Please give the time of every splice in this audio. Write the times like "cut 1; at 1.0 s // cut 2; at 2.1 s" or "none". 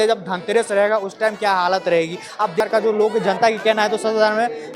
cut 1; at 2.6 s